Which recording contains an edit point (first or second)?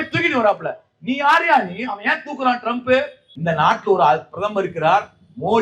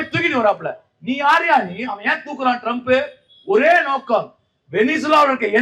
first